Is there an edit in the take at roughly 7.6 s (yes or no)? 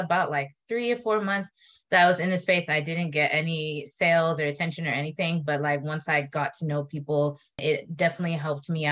yes